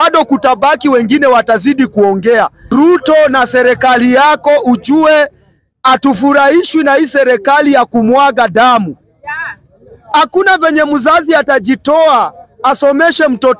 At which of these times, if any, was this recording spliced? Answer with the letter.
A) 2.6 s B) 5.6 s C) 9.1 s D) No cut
A